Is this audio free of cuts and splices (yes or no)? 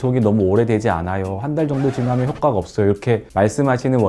yes